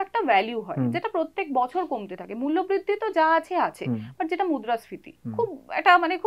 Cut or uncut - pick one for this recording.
uncut